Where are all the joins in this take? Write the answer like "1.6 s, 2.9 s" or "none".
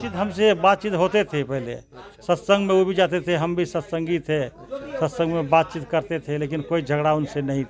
none